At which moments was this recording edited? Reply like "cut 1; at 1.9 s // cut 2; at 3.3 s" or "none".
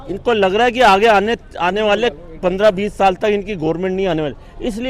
none